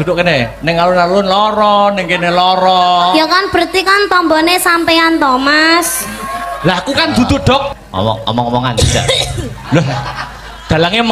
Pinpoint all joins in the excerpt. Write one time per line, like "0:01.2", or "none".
0:07.7